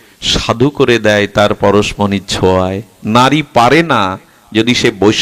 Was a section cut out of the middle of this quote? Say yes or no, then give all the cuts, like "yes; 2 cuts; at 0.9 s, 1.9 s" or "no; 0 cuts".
no; 0 cuts